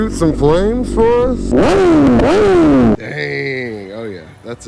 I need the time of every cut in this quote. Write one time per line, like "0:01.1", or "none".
0:01.5
0:03.0